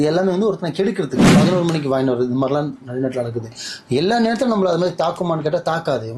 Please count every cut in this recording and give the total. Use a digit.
1